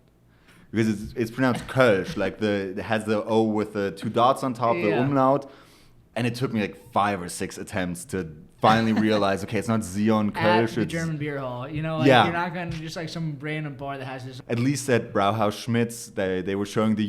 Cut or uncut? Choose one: cut